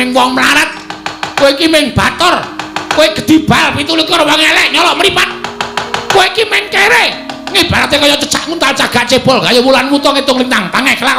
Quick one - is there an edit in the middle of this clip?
no; 0 cuts

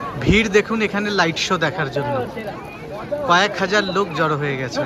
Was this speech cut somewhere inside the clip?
no; 0 cuts

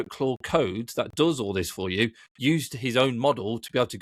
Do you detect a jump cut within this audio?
no; 0 cuts

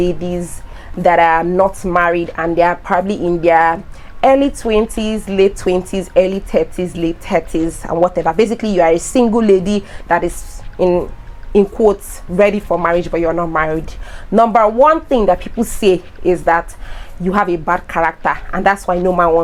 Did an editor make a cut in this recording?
no; 0 cuts

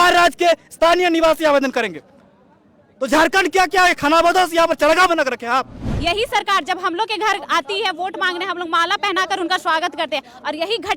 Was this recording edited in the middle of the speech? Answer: yes; 1 cut; at 5.8 s

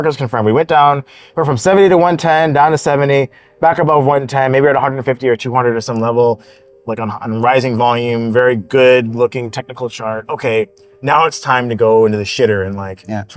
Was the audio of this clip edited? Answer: no; 0 cuts

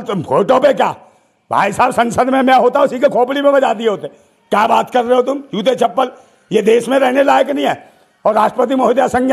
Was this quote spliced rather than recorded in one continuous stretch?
no; 0 cuts

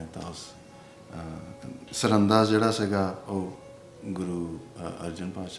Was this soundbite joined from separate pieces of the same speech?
yes; 1 cut; at 1.8 s

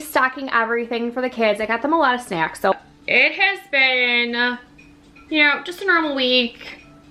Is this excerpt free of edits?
no; 1 cut; at 2.7 s

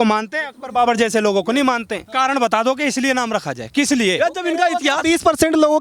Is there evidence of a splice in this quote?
yes; 1 cut; at 2.0 s

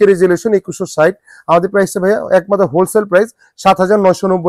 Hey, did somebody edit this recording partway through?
no; 0 cuts

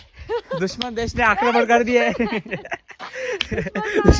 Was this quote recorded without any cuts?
yes; 0 cuts

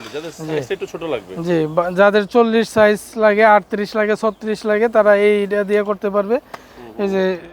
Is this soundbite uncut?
yes; 0 cuts

